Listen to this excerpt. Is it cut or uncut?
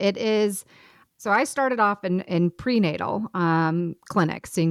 uncut